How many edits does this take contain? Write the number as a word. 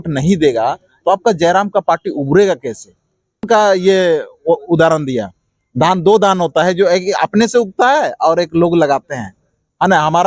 one